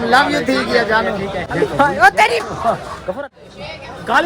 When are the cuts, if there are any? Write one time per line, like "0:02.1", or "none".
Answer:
0:01.4
0:03.1

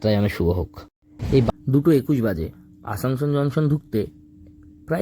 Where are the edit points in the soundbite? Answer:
0:01.5

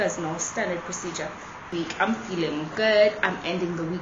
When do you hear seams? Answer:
0:01.6

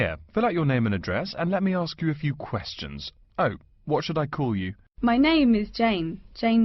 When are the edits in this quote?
0:04.8

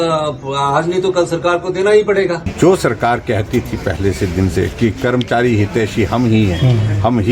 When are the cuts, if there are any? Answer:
0:02.5

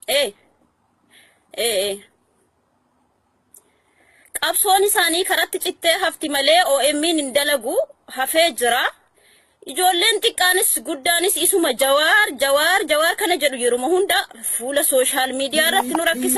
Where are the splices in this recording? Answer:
0:12.5

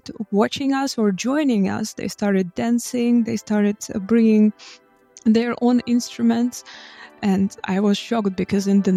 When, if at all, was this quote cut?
none

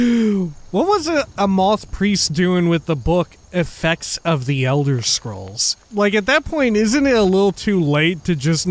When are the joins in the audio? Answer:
0:05.8

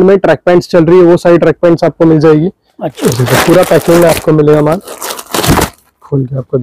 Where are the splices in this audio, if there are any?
0:03.0

